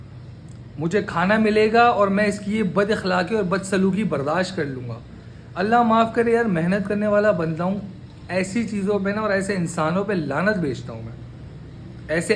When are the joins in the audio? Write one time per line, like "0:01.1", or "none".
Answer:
none